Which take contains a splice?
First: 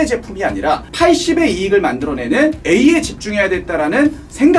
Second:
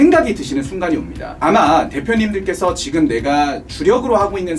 second; 1 cut; at 1.3 s

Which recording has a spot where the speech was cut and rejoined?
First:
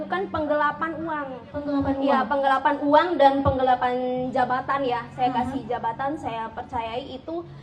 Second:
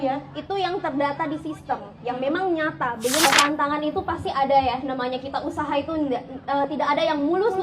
second; 1 cut; at 3.3 s

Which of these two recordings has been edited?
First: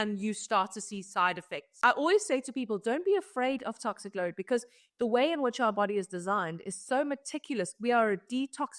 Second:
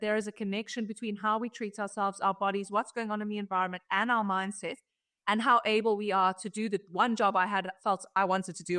first; 1 cut; at 1.6 s

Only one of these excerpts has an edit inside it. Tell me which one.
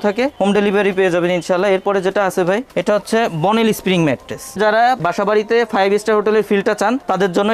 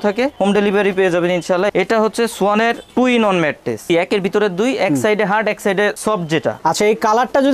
second; 3 cuts; at 1.7 s, 3.9 s, 6.6 s

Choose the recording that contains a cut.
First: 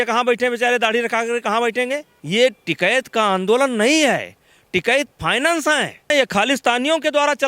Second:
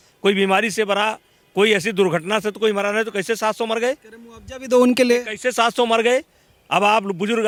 first; 2 cuts; at 2.1 s, 6.1 s

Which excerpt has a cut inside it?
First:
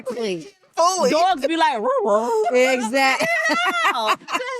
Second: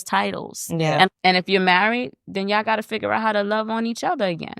second; 1 cut; at 1.1 s

